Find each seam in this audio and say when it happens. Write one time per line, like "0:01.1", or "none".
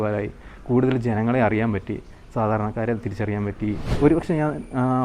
0:03.9